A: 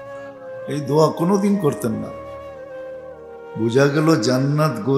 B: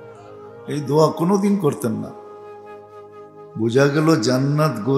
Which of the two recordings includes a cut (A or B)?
B